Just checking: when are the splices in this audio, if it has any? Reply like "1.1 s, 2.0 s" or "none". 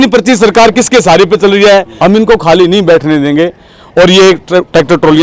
1.9 s